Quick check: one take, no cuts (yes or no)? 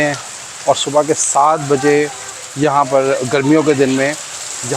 yes